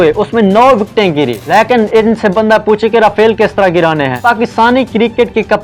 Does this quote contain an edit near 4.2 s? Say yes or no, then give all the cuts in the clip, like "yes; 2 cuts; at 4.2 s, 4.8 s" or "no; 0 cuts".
yes; 2 cuts; at 1.4 s, 4.2 s